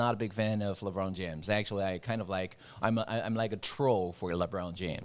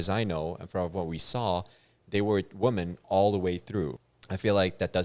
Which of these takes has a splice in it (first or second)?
second